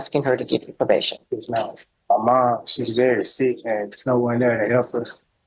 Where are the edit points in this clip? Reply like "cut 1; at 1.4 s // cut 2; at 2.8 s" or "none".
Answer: cut 1; at 1.9 s